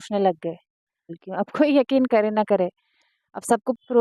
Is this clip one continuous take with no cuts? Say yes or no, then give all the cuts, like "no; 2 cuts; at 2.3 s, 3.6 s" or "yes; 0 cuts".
no; 1 cut; at 1.2 s